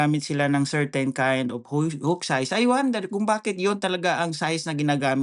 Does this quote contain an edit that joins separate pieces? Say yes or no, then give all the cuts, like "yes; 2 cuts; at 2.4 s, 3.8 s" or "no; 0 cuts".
no; 0 cuts